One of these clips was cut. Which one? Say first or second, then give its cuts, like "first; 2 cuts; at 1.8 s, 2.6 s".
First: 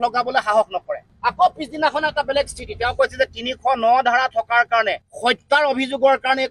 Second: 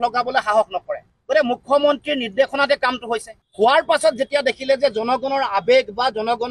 first; 1 cut; at 1.1 s